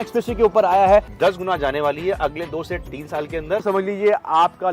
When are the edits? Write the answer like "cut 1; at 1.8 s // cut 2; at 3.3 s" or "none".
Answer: cut 1; at 1.1 s // cut 2; at 3.6 s

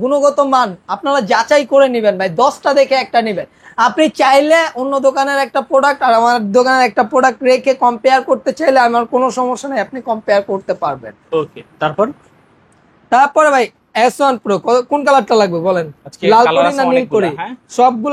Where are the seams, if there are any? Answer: none

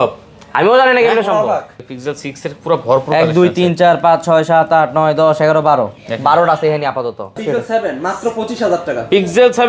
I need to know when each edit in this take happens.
cut 1; at 1.8 s // cut 2; at 7.4 s

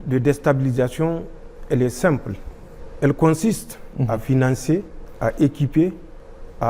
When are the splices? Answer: cut 1; at 3.9 s

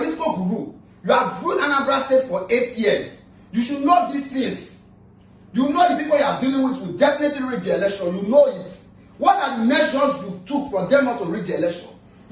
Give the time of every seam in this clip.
none

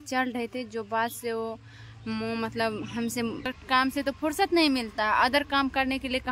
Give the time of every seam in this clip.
cut 1; at 3.6 s

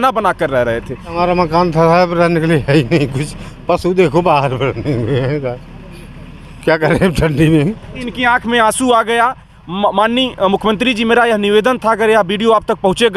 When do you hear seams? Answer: cut 1; at 1.2 s // cut 2; at 8.0 s

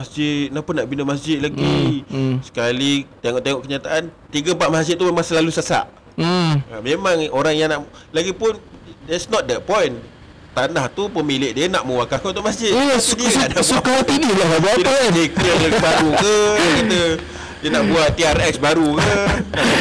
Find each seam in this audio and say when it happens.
none

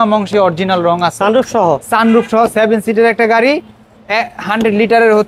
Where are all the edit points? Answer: none

